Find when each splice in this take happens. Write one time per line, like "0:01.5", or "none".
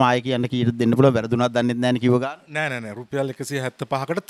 none